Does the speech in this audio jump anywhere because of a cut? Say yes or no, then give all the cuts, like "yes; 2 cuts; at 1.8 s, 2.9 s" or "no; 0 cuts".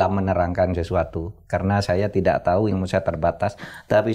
no; 0 cuts